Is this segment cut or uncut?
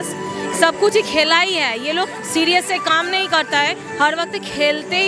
uncut